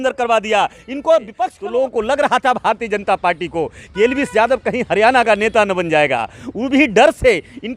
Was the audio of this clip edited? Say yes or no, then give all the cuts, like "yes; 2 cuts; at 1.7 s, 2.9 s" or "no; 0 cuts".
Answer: yes; 1 cut; at 1.5 s